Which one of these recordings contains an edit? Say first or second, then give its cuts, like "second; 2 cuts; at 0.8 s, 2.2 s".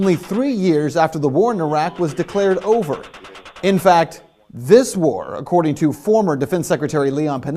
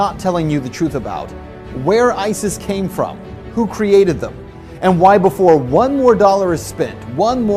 first; 1 cut; at 3.8 s